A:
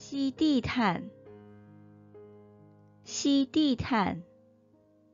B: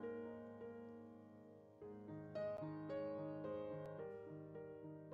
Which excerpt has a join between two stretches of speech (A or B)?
A